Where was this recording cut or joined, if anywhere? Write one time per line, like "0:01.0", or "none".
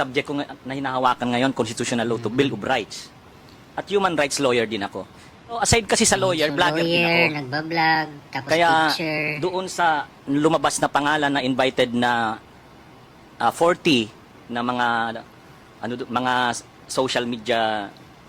0:05.5